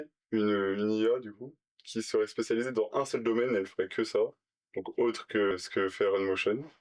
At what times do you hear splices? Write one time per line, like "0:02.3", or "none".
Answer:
0:05.5